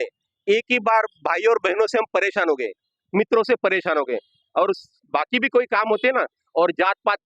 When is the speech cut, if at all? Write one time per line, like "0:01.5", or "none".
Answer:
none

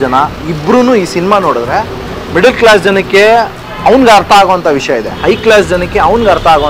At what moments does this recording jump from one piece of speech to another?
none

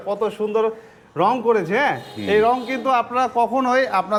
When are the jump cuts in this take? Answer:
none

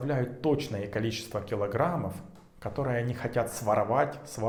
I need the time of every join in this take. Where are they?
none

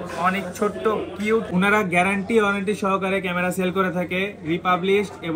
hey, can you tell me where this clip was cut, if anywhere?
0:01.5

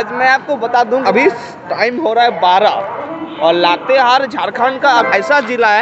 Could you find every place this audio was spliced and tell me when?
0:01.0
0:05.1

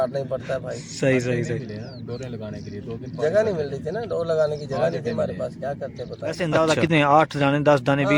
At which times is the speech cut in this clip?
0:06.4

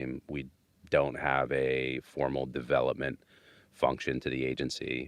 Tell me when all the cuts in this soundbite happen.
none

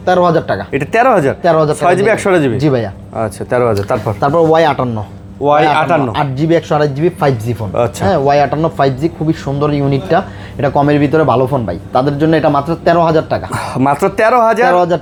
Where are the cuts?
none

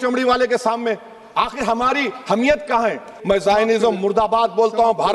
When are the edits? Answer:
0:03.1

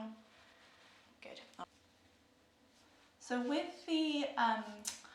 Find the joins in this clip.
0:01.6

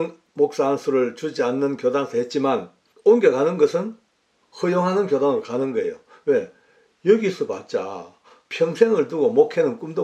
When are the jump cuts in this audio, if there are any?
none

